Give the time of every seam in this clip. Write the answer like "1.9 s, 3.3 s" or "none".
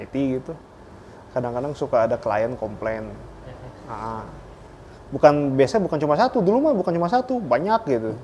none